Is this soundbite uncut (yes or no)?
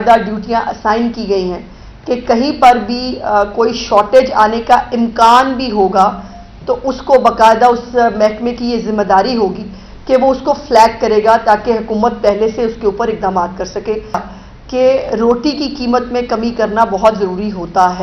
no